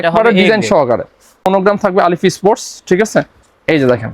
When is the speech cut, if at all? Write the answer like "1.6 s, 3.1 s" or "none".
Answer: 1.4 s